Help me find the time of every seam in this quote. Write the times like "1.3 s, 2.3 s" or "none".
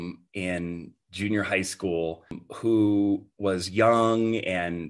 2.4 s